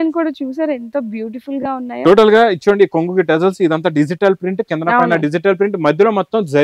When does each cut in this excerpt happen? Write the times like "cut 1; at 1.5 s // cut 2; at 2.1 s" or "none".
none